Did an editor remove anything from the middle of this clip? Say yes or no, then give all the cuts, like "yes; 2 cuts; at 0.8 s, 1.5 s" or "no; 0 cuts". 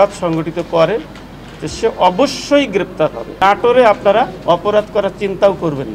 yes; 1 cut; at 3.4 s